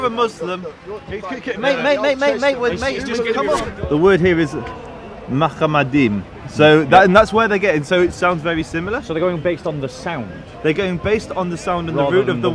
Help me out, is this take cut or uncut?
cut